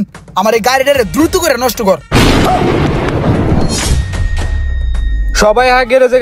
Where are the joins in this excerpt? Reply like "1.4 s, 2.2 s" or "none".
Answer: none